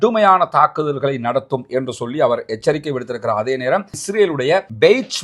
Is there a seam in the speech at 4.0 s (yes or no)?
yes